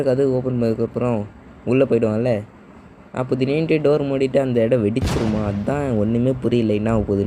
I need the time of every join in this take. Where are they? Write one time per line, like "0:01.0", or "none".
none